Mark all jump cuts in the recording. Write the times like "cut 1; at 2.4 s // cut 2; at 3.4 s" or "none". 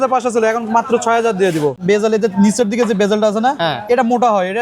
cut 1; at 1.8 s